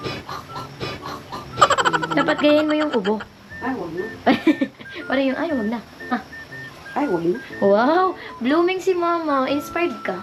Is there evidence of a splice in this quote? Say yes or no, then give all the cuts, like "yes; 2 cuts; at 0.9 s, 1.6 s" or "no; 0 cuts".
no; 0 cuts